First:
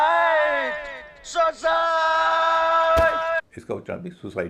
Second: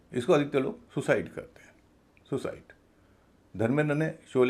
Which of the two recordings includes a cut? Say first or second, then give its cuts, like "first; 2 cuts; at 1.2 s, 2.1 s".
first; 1 cut; at 3.5 s